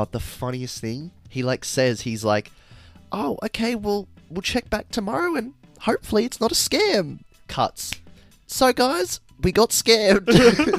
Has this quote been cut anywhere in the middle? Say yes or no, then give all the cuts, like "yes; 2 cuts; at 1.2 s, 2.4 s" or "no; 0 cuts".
no; 0 cuts